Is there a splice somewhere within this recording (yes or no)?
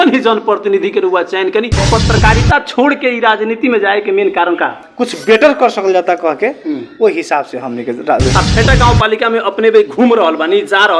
yes